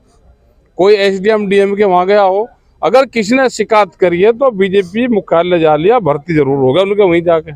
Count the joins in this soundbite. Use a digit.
0